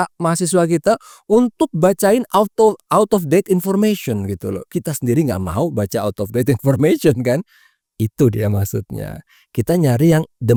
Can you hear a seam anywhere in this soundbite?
no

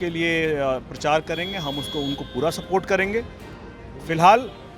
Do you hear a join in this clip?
no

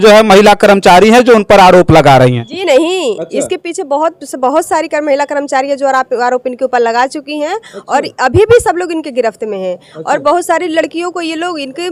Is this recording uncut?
yes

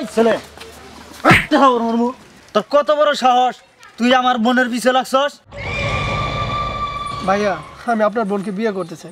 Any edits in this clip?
no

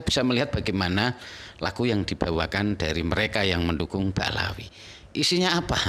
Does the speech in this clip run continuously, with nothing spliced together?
yes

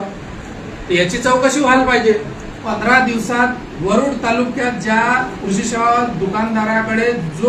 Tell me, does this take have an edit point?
yes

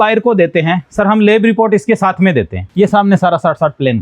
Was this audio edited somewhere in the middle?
yes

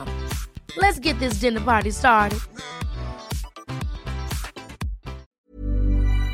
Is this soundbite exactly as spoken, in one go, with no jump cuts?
no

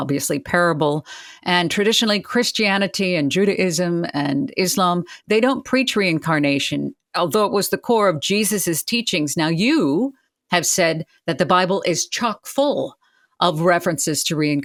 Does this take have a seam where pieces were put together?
no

